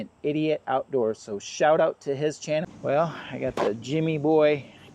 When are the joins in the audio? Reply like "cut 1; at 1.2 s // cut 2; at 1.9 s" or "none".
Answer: cut 1; at 2.6 s